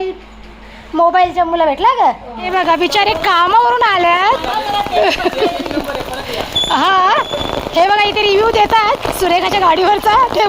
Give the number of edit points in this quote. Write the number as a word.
one